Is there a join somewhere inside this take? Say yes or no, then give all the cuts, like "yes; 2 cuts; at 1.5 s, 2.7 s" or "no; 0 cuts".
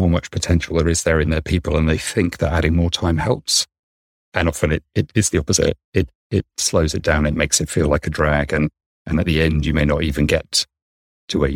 no; 0 cuts